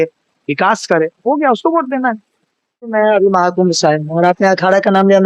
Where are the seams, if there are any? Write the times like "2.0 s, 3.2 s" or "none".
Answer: 2.9 s